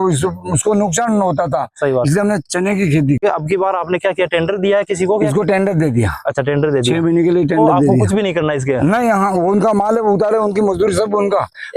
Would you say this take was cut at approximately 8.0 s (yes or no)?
yes